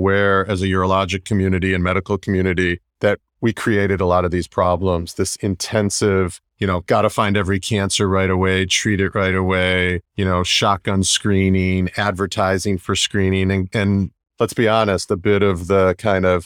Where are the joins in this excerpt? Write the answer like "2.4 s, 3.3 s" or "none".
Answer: 2.9 s, 6.4 s, 10.1 s